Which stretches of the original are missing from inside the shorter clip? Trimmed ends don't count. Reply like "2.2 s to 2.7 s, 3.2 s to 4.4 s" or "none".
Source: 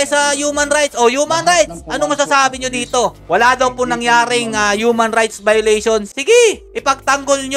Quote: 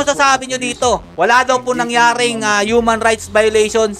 none